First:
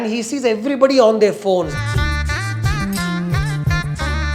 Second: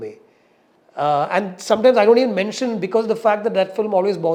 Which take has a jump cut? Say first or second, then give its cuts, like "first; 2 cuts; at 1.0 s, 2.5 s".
first; 1 cut; at 1.7 s